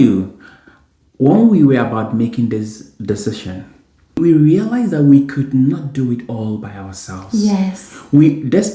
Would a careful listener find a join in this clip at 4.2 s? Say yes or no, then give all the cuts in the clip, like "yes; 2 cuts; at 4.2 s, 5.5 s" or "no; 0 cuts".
yes; 1 cut; at 4.2 s